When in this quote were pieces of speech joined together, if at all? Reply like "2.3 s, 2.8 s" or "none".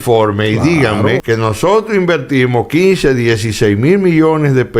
1.2 s